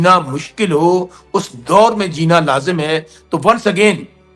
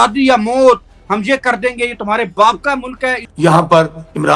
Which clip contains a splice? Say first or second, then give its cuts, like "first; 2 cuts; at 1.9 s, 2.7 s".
second; 1 cut; at 3.2 s